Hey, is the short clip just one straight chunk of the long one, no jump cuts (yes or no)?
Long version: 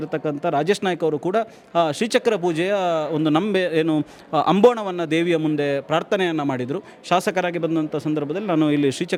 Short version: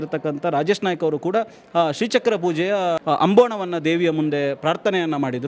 no